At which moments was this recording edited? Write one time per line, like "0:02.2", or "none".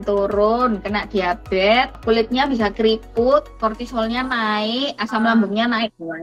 0:02.0
0:03.5